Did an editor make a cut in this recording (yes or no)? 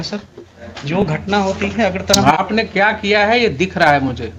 no